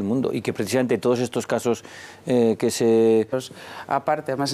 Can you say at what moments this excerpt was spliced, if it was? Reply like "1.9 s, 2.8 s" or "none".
none